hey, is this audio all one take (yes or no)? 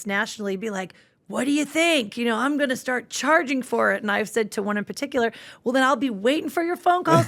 yes